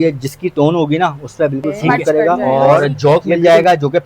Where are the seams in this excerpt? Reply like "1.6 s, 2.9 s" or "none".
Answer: 2.8 s